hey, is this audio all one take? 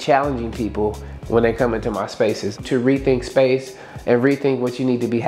yes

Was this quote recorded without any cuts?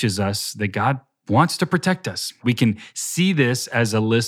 no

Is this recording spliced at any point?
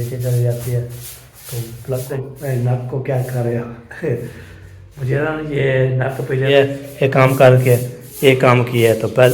yes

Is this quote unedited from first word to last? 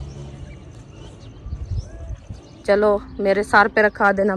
no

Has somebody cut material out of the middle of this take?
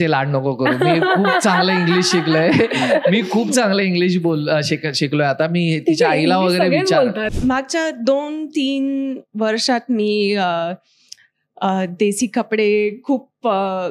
yes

